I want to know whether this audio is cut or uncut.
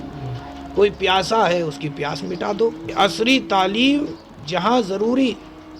cut